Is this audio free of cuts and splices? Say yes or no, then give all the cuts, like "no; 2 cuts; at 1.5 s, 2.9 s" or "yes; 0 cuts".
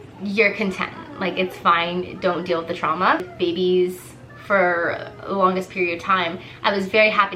no; 1 cut; at 3.3 s